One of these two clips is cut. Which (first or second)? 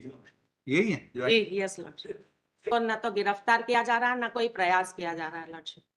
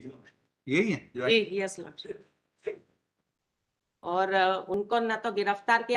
first